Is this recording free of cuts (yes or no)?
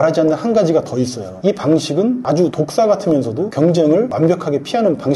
yes